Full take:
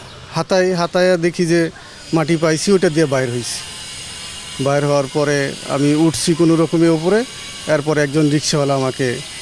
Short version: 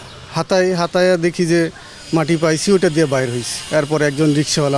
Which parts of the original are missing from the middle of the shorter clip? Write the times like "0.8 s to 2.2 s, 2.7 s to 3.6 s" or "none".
3.5 s to 7.5 s